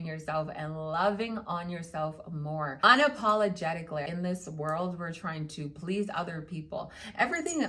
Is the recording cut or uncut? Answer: cut